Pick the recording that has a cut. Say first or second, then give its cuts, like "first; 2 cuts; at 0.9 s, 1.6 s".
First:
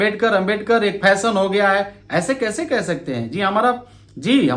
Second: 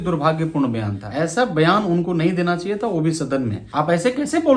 second; 2 cuts; at 1.0 s, 3.6 s